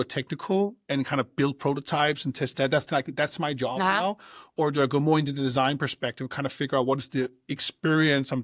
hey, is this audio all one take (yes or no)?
yes